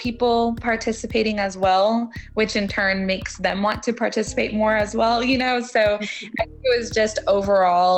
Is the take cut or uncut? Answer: uncut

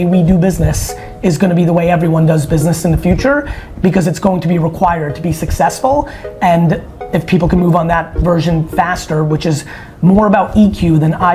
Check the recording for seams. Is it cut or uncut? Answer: uncut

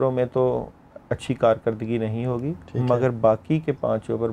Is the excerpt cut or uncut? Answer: uncut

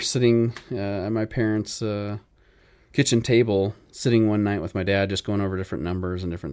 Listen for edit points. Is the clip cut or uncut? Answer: uncut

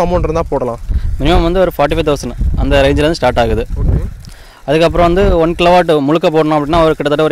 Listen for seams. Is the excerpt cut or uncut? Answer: uncut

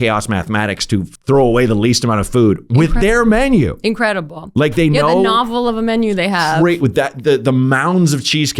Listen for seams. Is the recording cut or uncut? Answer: cut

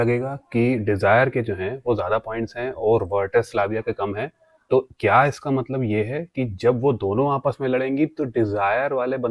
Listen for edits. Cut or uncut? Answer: uncut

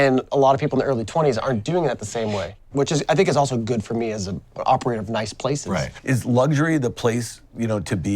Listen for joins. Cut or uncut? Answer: cut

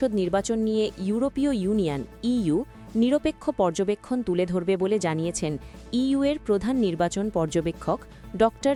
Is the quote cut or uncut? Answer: uncut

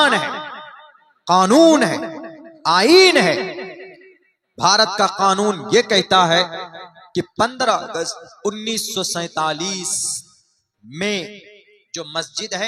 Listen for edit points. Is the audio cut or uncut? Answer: uncut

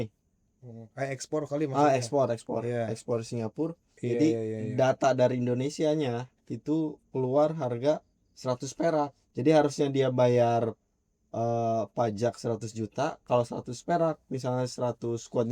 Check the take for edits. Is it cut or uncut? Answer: cut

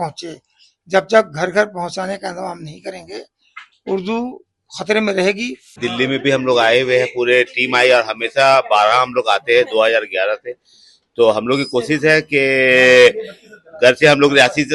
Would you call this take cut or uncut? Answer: cut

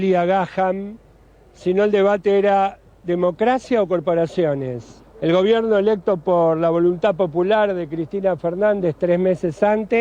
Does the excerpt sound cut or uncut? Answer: uncut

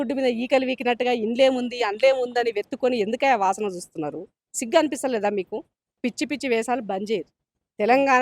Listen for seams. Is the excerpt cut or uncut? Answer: cut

